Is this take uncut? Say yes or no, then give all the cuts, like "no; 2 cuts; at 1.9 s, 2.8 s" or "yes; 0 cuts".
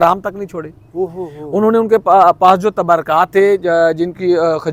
yes; 0 cuts